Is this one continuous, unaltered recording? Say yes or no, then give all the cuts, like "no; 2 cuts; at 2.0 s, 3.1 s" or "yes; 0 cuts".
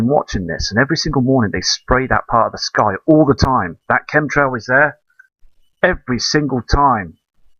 yes; 0 cuts